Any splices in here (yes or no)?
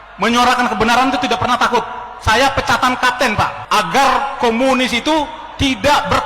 yes